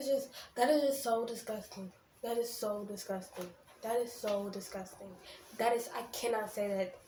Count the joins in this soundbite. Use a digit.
0